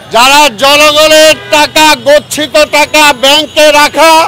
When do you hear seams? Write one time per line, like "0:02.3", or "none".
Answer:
none